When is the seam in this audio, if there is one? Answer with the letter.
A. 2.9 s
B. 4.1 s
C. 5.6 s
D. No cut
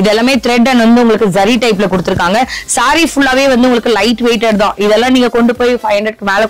D